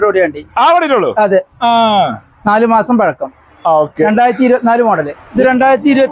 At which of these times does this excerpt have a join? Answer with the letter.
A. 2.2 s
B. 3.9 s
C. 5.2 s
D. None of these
C